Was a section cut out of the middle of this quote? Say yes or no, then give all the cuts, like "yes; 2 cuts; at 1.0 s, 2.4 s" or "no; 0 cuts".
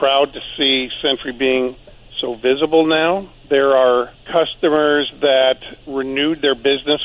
yes; 3 cuts; at 3.4 s, 4.2 s, 5.7 s